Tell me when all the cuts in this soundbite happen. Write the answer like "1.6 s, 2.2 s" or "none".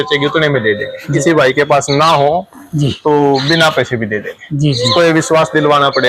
1.2 s, 4.9 s